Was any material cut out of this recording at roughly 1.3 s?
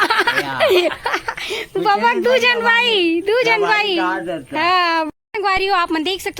no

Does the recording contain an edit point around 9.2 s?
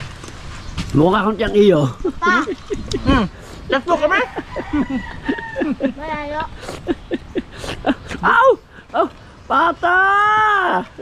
no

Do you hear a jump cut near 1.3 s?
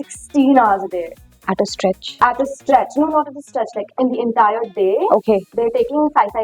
no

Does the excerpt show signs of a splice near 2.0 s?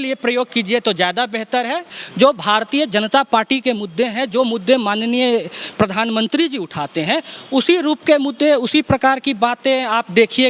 yes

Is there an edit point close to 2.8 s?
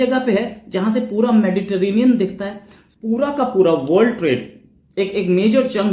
yes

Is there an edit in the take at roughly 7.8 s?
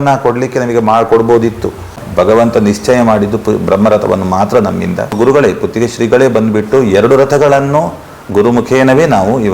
no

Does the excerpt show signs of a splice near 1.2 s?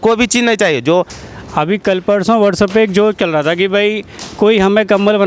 yes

